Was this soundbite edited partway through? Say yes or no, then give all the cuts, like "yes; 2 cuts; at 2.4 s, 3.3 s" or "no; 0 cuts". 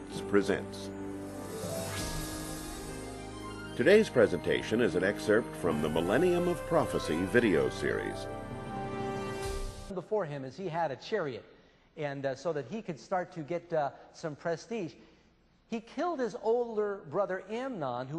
no; 0 cuts